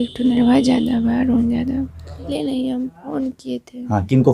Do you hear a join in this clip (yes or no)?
yes